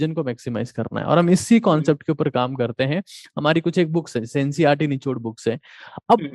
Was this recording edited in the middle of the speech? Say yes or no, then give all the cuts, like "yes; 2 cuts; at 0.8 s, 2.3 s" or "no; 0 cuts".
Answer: no; 0 cuts